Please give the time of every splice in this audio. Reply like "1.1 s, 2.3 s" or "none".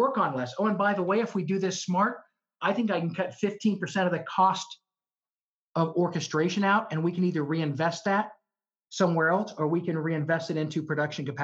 none

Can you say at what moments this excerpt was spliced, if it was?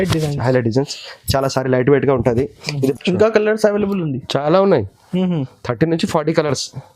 2.9 s

